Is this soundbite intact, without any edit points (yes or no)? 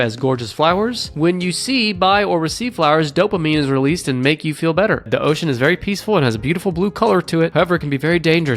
no